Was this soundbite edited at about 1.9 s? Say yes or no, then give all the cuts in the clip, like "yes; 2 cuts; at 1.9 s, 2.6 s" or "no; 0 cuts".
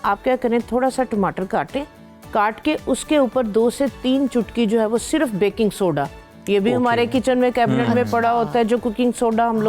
no; 0 cuts